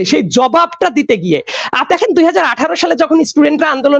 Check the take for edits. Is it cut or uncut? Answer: cut